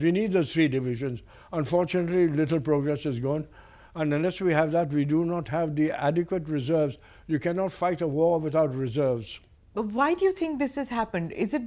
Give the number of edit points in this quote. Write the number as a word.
zero